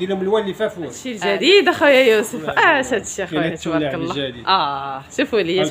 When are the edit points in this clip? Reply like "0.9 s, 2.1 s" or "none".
1.1 s